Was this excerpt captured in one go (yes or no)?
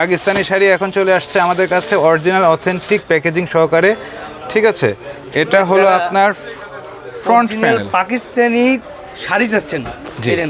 yes